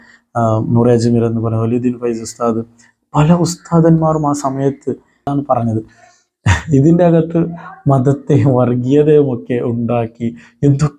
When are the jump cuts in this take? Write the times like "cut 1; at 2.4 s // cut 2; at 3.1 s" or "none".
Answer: cut 1; at 5.2 s

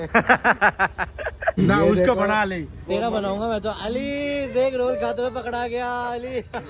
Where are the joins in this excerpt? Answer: cut 1; at 1.5 s

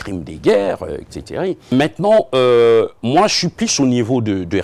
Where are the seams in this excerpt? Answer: cut 1; at 1.7 s

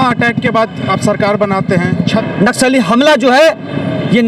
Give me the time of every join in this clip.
cut 1; at 2.2 s

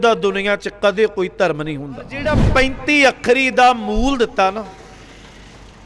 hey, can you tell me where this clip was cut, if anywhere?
cut 1; at 2.4 s

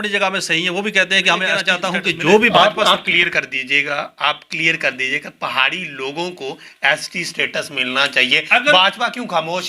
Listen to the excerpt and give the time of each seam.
cut 1; at 1.6 s

